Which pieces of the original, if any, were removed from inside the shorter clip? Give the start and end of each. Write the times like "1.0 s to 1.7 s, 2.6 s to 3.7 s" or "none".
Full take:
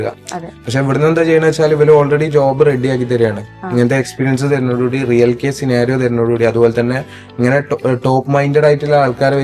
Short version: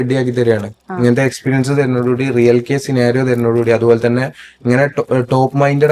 none